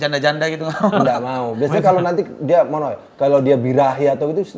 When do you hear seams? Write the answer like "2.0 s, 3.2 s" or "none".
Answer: none